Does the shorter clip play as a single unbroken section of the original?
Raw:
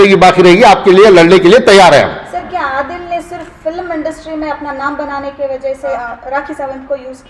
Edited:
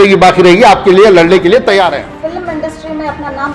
no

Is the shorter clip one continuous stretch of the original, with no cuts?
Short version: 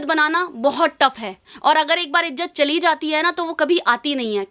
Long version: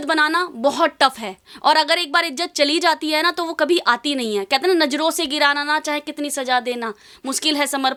yes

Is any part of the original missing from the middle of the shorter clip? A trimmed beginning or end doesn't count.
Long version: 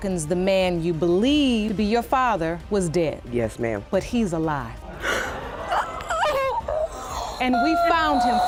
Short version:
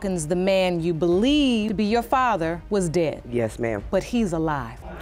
no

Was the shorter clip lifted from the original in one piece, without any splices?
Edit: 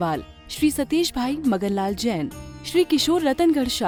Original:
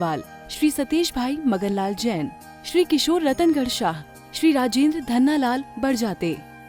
yes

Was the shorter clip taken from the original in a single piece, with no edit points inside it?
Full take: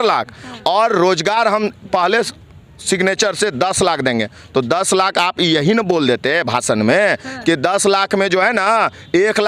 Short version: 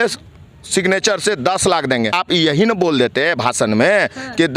no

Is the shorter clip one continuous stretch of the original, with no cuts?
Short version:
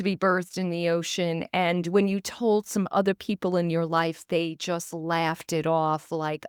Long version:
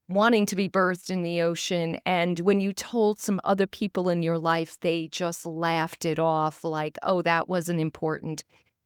yes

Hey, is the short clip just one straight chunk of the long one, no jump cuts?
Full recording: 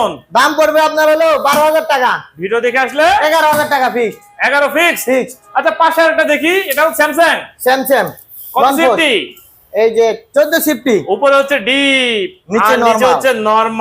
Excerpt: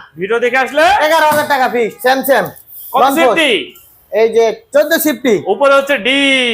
no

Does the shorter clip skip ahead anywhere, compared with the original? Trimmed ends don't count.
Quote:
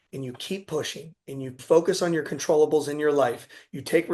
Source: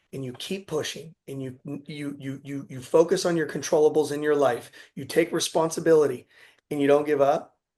yes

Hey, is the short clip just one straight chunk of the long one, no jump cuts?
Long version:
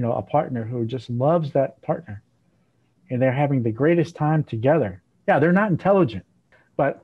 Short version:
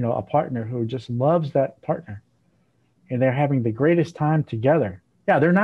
yes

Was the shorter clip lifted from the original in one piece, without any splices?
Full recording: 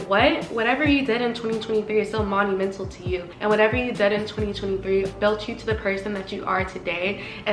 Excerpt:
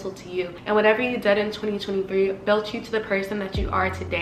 yes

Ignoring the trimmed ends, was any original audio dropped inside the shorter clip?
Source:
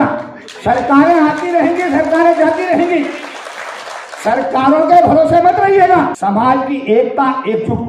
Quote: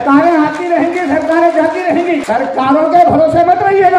yes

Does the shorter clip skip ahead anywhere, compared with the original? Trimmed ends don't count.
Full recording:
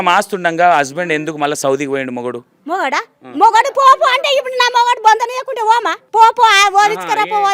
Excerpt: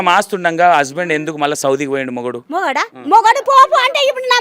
yes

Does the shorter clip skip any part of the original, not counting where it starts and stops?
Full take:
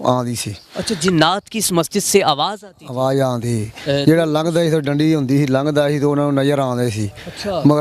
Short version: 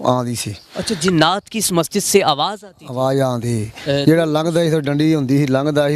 no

